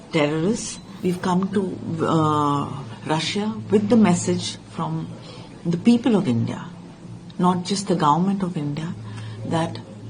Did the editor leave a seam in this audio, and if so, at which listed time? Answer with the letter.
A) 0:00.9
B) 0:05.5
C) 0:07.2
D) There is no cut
A